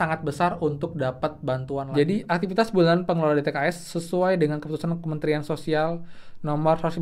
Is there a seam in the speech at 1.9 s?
yes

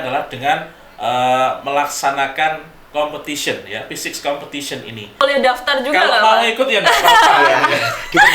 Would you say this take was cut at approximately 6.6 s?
no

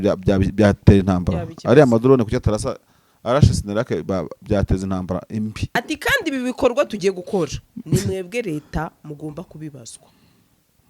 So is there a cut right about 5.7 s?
yes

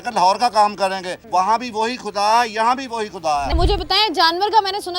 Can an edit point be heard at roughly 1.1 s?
yes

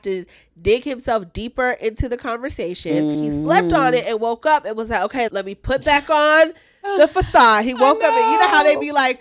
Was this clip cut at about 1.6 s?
no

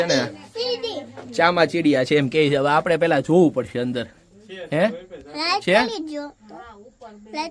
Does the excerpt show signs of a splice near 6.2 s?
no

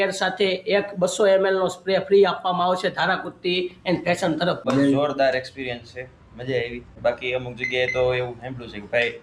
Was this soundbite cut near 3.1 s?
no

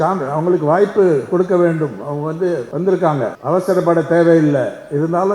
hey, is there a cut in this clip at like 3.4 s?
yes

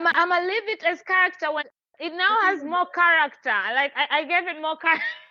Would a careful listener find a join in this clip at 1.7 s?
yes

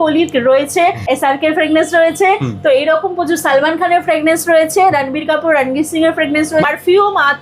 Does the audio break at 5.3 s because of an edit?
no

